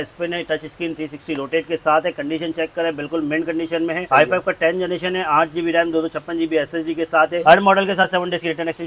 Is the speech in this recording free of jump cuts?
no; 2 cuts; at 4.0 s, 7.4 s

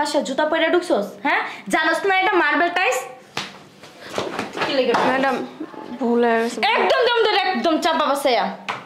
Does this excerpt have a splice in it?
no; 0 cuts

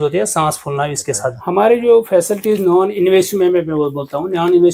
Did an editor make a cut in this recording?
yes; 1 cut; at 1.3 s

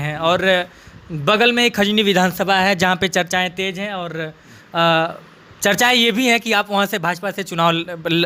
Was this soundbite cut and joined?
no; 0 cuts

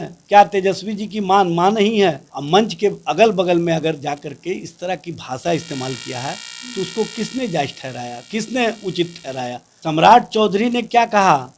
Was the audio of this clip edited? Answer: yes; 2 cuts; at 2.3 s, 9.7 s

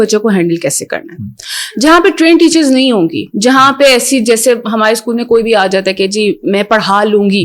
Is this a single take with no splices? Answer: yes; 0 cuts

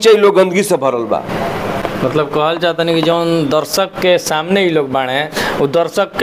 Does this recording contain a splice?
no; 0 cuts

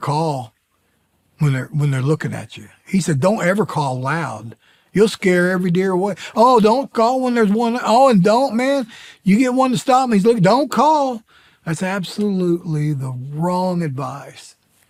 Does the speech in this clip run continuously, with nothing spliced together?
yes; 0 cuts

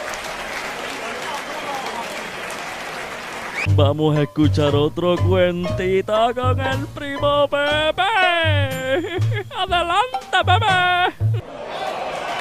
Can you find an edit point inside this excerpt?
yes; 1 cut; at 3.6 s

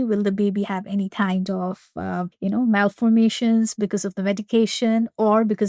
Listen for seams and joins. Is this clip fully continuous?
no; 1 cut; at 2.3 s

